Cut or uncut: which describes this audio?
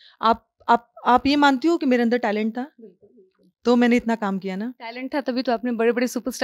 uncut